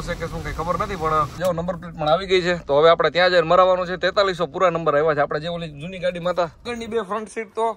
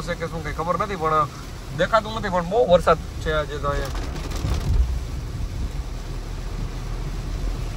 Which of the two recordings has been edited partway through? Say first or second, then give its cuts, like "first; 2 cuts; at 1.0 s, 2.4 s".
first; 2 cuts; at 1.3 s, 6.7 s